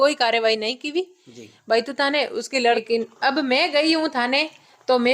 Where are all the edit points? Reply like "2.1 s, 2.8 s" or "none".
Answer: 2.8 s

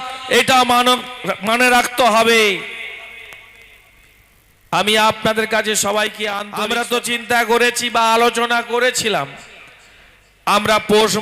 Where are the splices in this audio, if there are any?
6.4 s

